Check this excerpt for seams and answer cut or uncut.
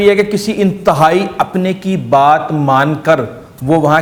uncut